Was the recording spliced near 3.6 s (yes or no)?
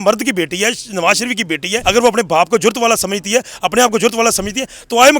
no